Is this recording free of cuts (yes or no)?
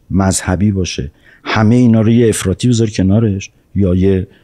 yes